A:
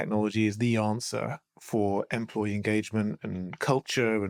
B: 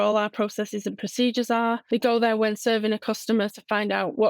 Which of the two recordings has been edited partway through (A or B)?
B